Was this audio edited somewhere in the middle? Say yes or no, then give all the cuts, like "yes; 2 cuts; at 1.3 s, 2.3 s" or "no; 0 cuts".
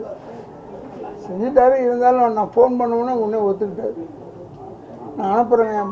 no; 0 cuts